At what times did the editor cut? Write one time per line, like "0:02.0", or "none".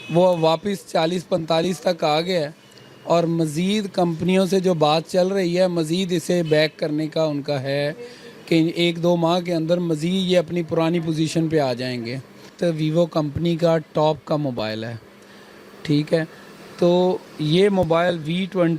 0:12.5